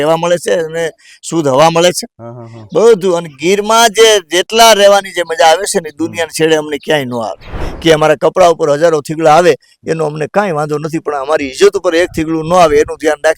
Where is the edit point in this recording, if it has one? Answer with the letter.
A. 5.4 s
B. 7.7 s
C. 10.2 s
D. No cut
B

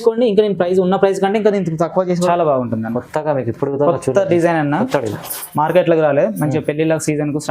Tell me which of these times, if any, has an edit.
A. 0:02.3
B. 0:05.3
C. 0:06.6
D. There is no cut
A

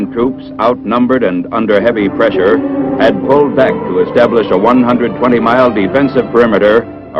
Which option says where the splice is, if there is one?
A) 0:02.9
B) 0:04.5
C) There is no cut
A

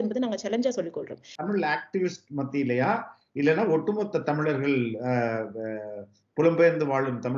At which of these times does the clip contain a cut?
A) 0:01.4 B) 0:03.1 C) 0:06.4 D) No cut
A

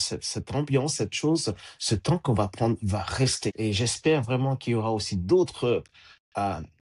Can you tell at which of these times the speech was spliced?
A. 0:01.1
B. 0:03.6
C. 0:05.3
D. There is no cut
B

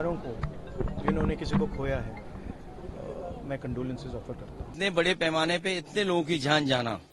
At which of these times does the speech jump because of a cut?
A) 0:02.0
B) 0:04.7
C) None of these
B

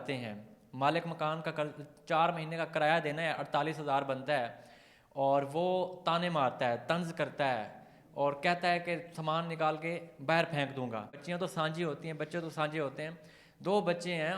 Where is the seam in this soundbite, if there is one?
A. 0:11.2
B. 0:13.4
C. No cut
A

